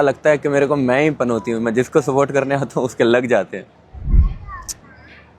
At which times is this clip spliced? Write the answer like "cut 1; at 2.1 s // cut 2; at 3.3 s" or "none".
none